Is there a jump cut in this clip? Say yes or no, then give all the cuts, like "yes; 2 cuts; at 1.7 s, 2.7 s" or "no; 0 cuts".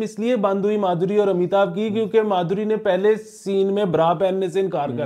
no; 0 cuts